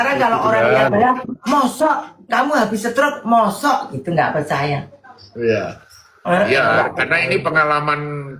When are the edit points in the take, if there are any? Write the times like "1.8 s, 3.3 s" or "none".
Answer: none